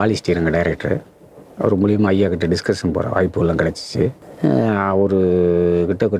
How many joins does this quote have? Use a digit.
1